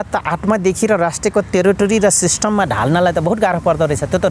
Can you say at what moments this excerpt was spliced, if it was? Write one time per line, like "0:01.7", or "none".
none